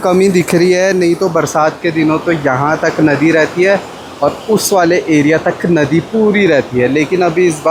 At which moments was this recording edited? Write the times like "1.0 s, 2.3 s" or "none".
none

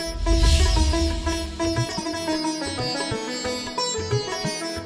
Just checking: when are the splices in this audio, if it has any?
2.1 s

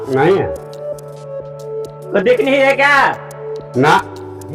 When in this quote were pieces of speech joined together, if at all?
none

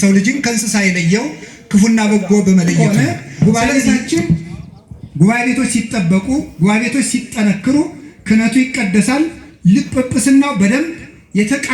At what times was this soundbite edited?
2.8 s

